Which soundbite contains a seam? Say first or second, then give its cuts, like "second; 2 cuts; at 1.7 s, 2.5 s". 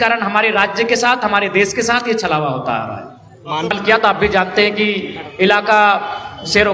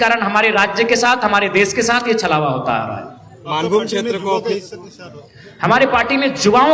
first; 1 cut; at 3.7 s